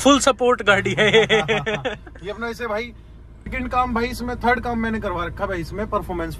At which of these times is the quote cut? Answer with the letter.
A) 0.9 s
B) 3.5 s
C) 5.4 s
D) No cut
B